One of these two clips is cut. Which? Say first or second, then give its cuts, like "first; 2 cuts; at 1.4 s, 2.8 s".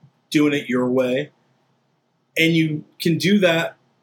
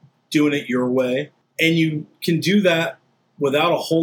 second; 1 cut; at 1.4 s